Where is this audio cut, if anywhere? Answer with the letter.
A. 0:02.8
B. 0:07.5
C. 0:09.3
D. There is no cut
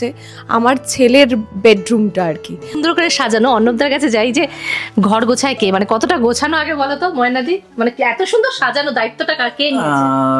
A